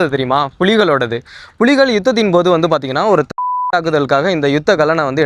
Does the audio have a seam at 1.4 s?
no; 0 cuts

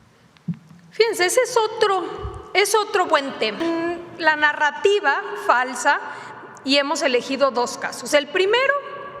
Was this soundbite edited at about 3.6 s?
yes; 1 cut; at 3.6 s

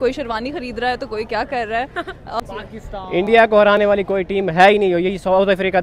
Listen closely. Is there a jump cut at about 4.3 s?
no; 1 cut; at 2.4 s

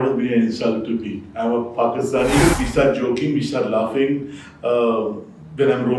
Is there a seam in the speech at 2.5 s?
yes; 1 cut; at 2.5 s

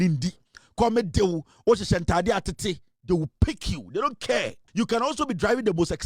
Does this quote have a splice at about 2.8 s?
no; 1 cut; at 4.6 s

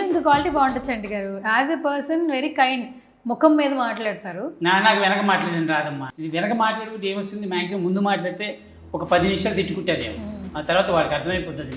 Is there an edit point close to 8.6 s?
no; 1 cut; at 6.0 s

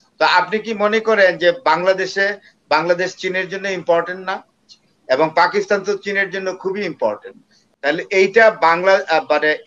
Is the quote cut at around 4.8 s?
no; 1 cut; at 7.6 s

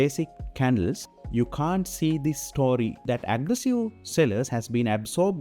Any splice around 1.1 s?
yes; 2 cuts; at 1.1 s, 3.1 s

